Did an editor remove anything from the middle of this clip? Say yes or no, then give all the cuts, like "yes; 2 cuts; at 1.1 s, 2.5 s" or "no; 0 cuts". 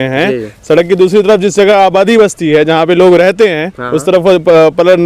no; 0 cuts